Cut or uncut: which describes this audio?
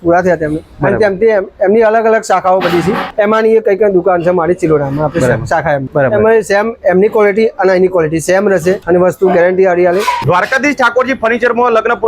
cut